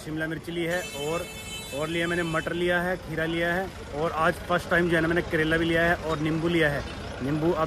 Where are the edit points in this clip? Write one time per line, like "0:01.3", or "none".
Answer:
none